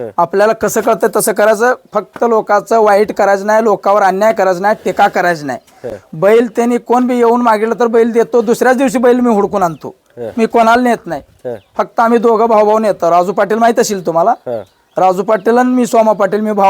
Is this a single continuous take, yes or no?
yes